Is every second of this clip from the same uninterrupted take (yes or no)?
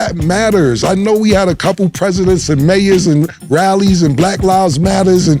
yes